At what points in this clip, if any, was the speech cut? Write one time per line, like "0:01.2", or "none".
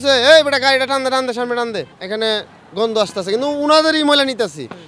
0:01.9